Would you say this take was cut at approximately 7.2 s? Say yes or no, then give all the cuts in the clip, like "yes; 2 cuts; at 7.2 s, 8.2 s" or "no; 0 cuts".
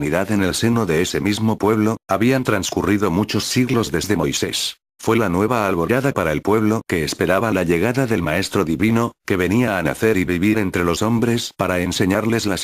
no; 1 cut; at 5.3 s